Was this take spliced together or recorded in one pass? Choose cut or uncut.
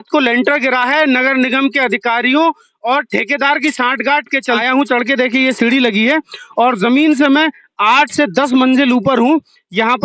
cut